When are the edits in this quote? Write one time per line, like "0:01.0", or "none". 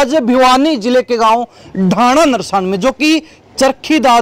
none